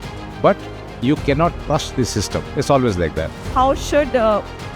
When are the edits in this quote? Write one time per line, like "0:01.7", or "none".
0:03.5